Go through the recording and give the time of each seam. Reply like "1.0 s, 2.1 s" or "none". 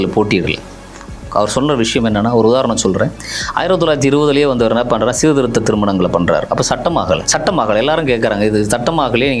7.2 s